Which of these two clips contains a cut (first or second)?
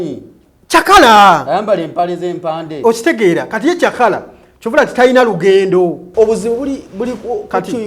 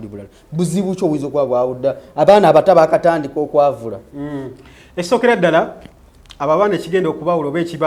first